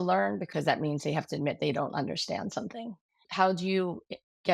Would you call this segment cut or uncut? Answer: cut